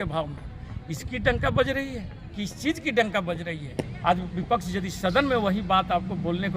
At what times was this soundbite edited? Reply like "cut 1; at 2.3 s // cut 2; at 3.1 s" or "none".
cut 1; at 3.9 s